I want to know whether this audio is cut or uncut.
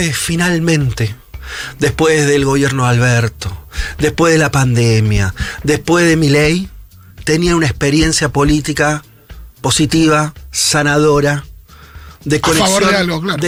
uncut